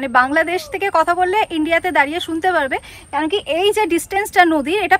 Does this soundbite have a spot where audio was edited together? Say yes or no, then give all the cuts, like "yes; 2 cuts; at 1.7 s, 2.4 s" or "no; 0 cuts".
no; 0 cuts